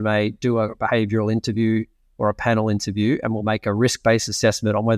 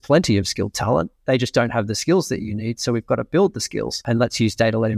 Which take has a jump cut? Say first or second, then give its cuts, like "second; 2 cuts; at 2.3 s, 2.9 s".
second; 1 cut; at 4.0 s